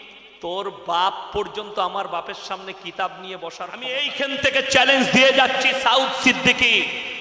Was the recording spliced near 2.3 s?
no; 1 cut; at 4.0 s

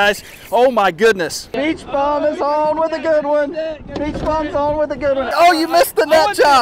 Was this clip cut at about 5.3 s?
yes; 2 cuts; at 1.5 s, 5.3 s

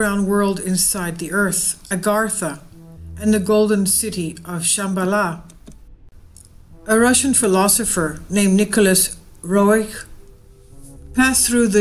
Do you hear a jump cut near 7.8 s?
yes; 1 cut; at 7.8 s

